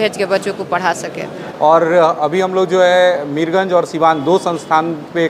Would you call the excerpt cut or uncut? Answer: cut